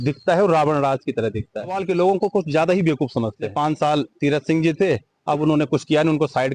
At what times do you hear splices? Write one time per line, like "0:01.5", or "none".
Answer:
0:01.8
0:03.4